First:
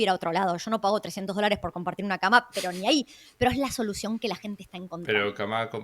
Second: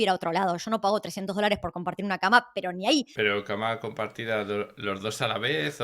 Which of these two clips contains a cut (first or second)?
second